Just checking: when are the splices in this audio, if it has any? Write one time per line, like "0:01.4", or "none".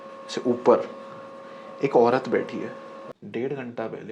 0:03.2